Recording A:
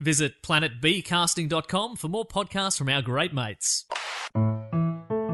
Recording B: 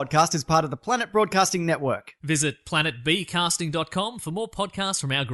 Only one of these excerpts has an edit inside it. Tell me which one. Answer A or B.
A